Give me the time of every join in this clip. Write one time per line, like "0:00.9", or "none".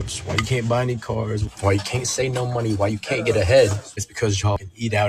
none